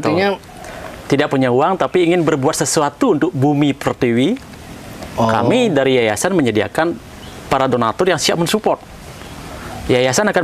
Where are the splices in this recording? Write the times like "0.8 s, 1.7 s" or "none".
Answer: none